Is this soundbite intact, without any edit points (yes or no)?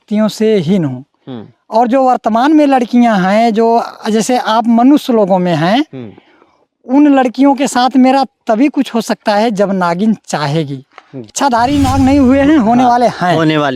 no